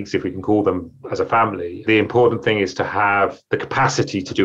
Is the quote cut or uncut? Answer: uncut